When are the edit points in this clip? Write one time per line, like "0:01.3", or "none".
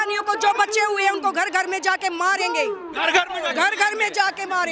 none